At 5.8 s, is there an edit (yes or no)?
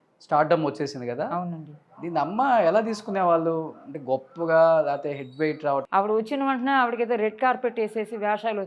yes